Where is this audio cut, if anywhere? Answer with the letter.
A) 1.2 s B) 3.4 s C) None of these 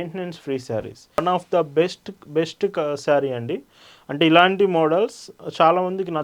A